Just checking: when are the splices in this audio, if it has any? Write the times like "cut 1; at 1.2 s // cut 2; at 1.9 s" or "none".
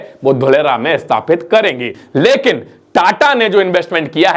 cut 1; at 2.0 s